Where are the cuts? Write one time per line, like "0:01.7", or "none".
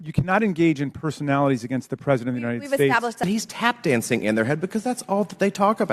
0:03.2